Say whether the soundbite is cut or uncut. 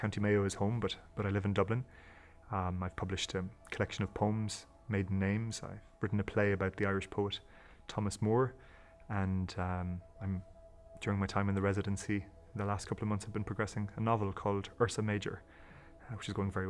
cut